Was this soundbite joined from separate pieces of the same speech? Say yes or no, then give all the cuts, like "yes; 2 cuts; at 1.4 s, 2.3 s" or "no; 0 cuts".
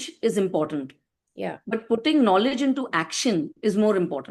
no; 0 cuts